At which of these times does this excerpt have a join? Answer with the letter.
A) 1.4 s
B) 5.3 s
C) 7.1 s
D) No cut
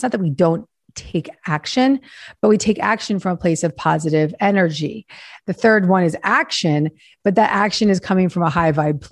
B